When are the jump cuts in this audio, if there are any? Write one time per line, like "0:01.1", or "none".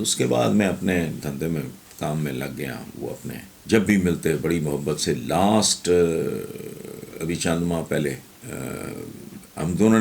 0:03.5
0:08.3